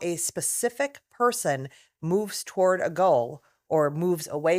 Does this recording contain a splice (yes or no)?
no